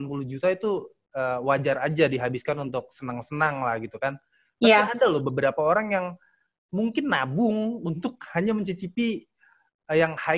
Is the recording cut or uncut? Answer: uncut